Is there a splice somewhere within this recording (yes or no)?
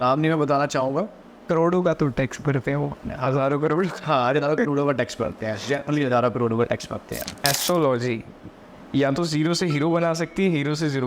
yes